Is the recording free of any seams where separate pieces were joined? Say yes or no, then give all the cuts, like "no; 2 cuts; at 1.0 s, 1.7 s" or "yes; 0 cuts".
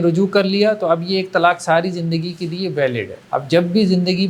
no; 1 cut; at 3.2 s